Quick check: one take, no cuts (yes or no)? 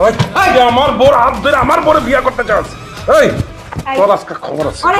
yes